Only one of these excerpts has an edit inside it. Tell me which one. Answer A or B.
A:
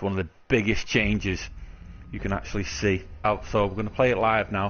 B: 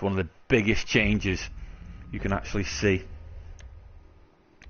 B